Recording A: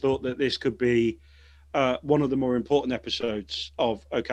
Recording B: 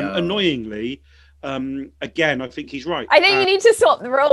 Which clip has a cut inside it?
B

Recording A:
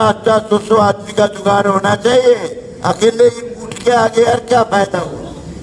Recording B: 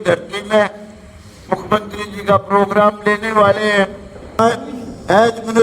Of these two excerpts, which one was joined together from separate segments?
B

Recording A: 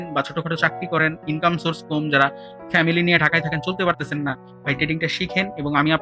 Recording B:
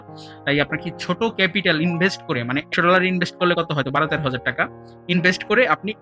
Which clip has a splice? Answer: B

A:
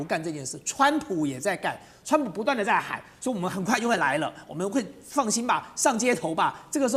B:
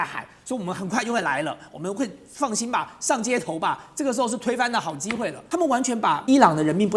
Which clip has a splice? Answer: B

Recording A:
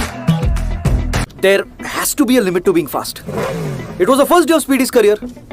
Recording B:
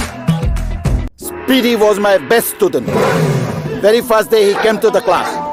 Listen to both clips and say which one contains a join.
A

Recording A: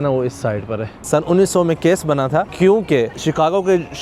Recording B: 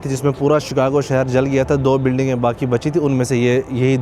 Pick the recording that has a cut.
A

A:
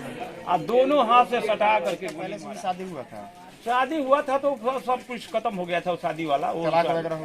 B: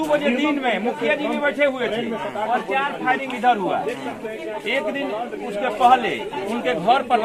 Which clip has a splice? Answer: A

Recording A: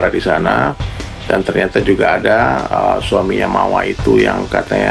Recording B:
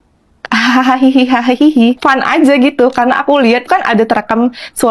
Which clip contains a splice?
B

